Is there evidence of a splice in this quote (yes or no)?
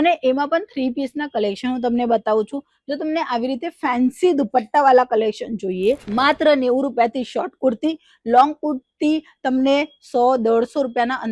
yes